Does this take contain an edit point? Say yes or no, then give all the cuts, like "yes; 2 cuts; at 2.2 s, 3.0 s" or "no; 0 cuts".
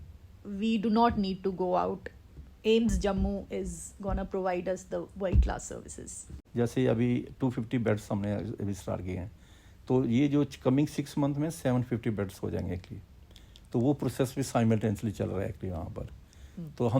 yes; 1 cut; at 6.3 s